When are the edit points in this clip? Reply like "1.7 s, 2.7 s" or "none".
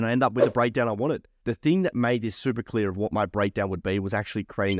1.3 s